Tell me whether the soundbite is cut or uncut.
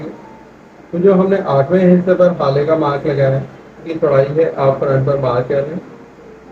cut